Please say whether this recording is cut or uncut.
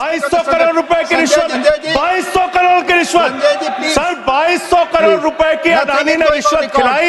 cut